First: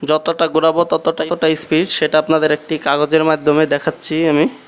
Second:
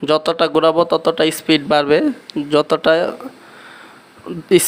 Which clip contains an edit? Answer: first; 1 cut; at 1.3 s

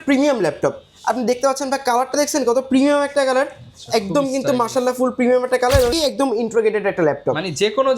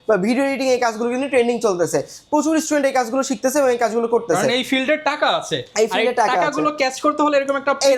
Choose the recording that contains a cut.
first; 1 cut; at 5.9 s

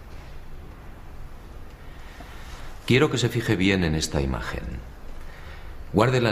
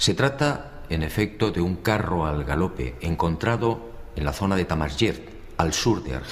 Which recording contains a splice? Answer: second; 1 cut; at 5.3 s

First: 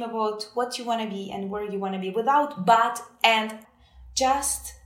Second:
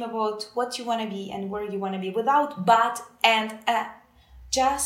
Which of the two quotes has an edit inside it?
first; 1 cut; at 3.6 s

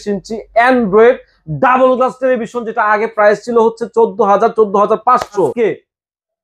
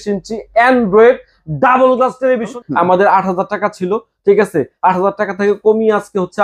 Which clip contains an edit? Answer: second; 1 cut; at 2.6 s

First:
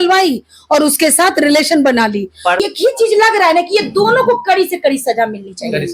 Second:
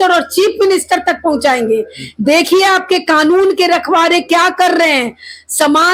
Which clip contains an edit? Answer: first; 1 cut; at 2.6 s

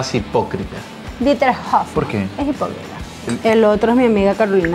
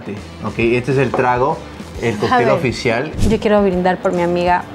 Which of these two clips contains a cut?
second; 1 cut; at 3.2 s

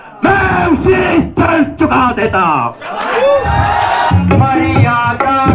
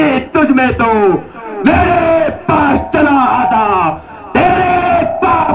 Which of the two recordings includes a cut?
first; 1 cut; at 4.1 s

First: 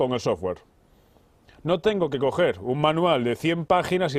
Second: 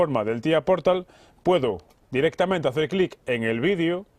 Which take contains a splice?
second; 1 cut; at 2.0 s

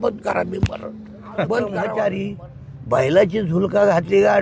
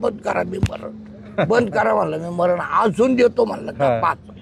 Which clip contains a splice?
first; 1 cut; at 1.8 s

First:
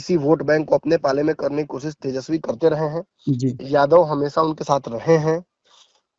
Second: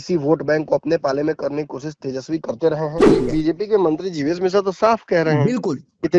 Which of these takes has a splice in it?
second; 1 cut; at 3.0 s

